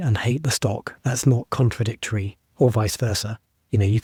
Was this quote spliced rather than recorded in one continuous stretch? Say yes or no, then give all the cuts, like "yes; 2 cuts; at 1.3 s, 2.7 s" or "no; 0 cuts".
no; 0 cuts